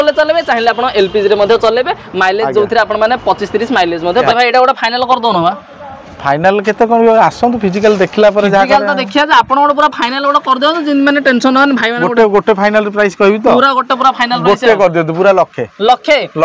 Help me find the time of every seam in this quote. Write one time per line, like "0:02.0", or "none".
0:04.3

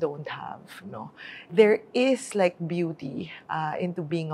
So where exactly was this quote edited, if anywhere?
0:01.4

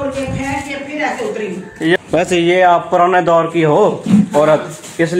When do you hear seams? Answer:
0:02.0

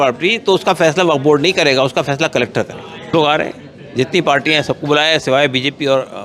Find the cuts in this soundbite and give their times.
0:03.1

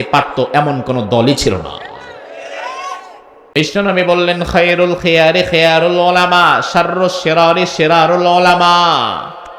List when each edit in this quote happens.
0:03.6

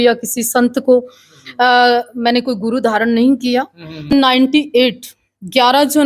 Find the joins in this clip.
0:04.1

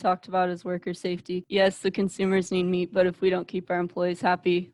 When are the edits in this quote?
0:01.4

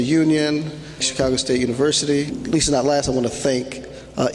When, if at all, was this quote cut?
0:01.1
0:02.4

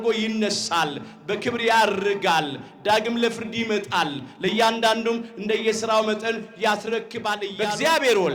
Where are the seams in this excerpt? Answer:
0:07.4

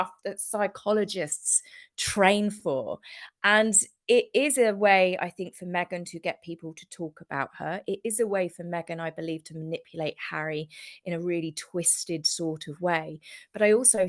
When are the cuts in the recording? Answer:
none

